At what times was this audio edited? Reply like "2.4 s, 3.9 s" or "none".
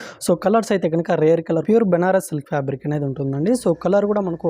1.6 s